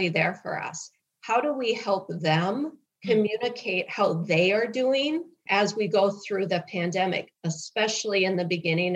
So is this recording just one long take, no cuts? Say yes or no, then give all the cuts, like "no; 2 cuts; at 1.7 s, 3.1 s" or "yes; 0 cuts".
yes; 0 cuts